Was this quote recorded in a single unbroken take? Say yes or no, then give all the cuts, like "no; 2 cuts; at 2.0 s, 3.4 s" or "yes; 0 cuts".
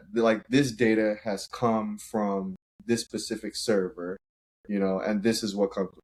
yes; 0 cuts